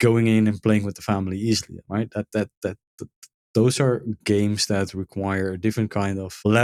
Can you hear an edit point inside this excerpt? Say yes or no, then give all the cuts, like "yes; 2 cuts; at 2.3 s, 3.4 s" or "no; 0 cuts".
no; 0 cuts